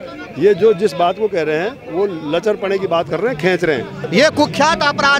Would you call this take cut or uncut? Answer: cut